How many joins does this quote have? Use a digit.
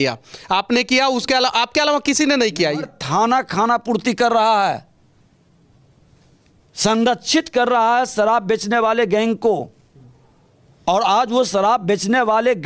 1